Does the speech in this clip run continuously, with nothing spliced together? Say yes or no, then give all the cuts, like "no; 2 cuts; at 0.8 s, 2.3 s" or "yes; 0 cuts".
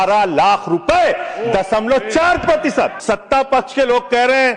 no; 1 cut; at 3.0 s